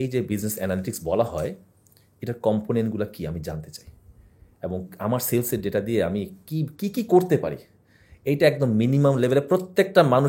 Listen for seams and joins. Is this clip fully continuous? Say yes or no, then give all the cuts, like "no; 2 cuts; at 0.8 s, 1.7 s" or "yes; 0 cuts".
yes; 0 cuts